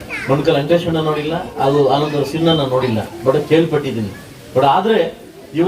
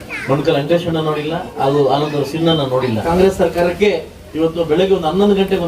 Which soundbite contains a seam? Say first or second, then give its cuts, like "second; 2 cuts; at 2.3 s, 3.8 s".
second; 1 cut; at 3.0 s